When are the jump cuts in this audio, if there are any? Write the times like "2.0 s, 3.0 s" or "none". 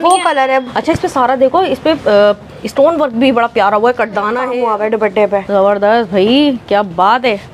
4.5 s